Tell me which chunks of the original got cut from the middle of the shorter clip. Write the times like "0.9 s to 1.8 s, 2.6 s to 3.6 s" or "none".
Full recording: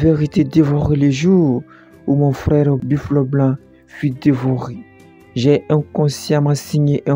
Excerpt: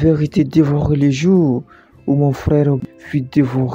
2.8 s to 3.7 s